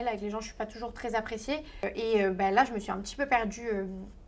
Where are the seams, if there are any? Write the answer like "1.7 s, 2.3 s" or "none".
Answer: 1.8 s